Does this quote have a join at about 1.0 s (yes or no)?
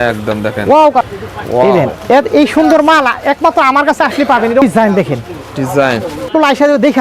yes